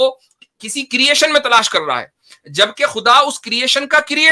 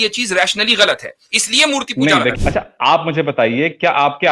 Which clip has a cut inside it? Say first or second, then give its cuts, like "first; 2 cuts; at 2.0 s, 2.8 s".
second; 1 cut; at 2.4 s